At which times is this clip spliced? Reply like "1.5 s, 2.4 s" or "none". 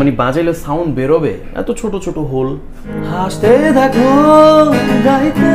3.0 s